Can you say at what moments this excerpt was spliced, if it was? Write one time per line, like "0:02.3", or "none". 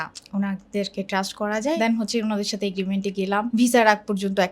0:01.8
0:03.5

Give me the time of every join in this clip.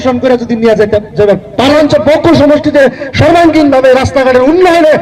0:01.8

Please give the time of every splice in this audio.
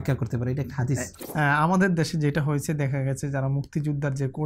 0:01.2

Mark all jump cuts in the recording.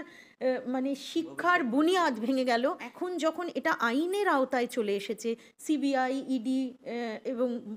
0:02.9

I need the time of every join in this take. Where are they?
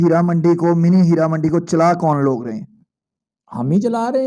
none

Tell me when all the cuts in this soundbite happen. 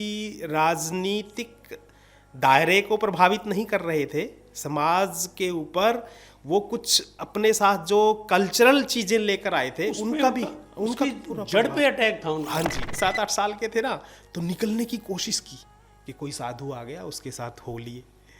0:12.9

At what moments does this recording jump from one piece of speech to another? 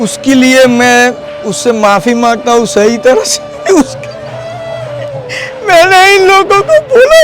none

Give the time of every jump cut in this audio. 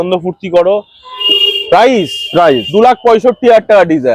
0:01.1

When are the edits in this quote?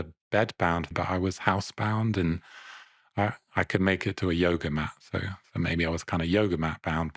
0:00.9

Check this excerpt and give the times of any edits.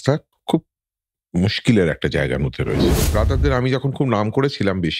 0:02.9

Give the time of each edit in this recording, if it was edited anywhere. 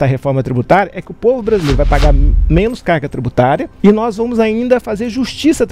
0:03.7

